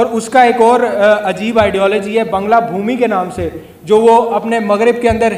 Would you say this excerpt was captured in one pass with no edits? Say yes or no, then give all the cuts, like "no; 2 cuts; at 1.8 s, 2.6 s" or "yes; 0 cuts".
yes; 0 cuts